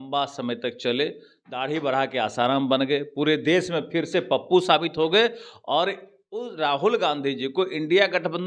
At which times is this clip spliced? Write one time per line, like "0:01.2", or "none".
none